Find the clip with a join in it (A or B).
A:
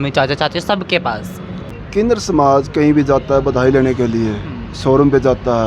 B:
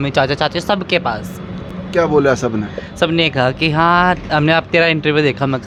A